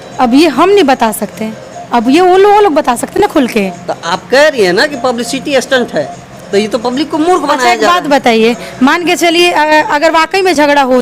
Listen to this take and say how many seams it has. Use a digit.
0